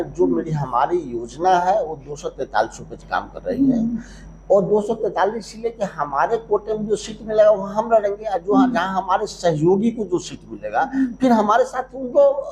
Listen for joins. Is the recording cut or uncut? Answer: uncut